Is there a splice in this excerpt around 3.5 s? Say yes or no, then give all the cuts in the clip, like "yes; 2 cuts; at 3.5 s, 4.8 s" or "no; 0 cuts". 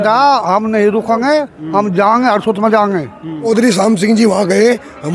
yes; 1 cut; at 3.5 s